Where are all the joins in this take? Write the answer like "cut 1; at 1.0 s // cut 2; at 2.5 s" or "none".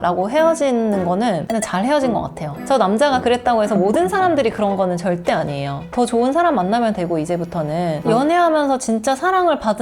cut 1; at 2.6 s // cut 2; at 8.0 s